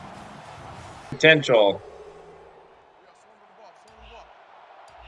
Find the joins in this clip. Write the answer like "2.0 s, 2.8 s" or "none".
1.1 s

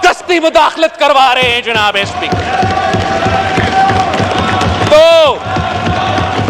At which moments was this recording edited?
none

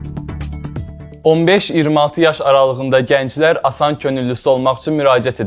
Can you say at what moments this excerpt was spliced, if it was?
1.2 s

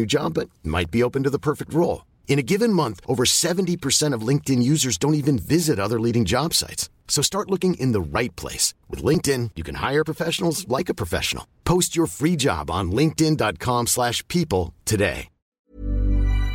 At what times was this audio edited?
15.5 s

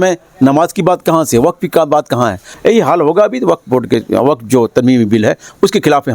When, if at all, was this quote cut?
2.5 s

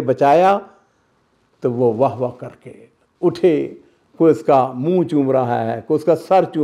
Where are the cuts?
none

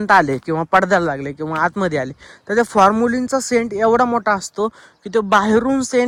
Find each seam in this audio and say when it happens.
none

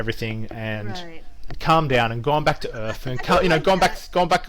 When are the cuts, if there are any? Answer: none

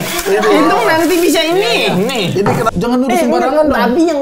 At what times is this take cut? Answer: 2.7 s

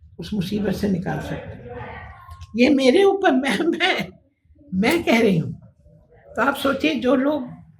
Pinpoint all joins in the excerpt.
none

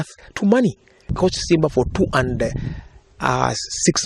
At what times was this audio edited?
1.1 s

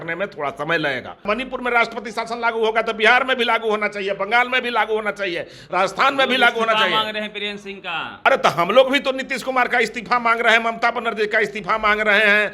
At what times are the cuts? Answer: 1.2 s, 8.2 s

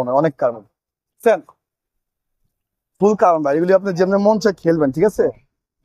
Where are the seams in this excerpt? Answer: none

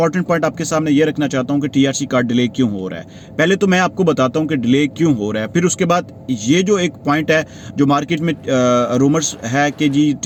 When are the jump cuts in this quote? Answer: none

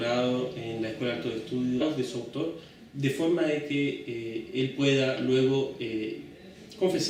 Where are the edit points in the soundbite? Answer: none

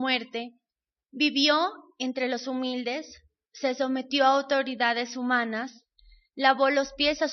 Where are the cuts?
none

